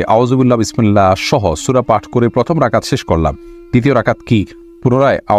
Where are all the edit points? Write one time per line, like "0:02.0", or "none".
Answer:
none